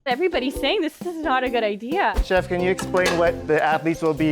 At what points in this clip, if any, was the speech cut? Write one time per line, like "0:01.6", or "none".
0:02.2